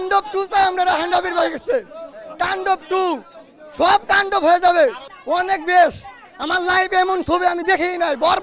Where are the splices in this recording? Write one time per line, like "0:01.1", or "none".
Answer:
0:05.1

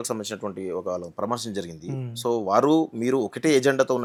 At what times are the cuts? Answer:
none

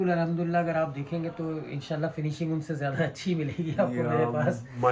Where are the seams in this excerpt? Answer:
none

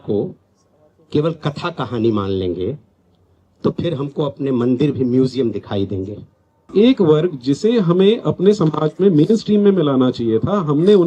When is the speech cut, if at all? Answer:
0:06.7

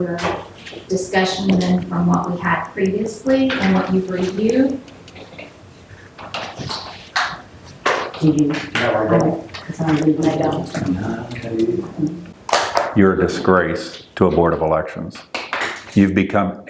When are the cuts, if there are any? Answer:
0:12.3

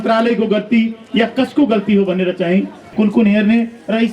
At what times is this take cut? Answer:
0:02.9

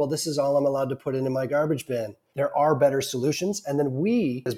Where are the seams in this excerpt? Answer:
0:02.2

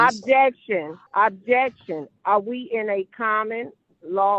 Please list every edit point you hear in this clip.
0:01.0

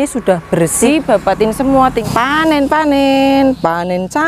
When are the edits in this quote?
0:00.9
0:02.0

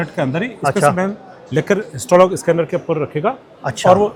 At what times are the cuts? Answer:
none

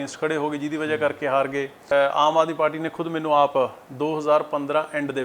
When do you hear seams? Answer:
0:01.8

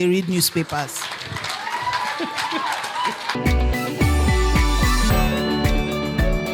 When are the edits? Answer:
0:03.3

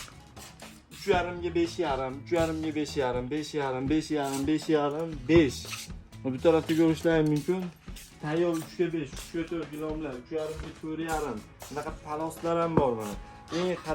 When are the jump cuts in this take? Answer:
none

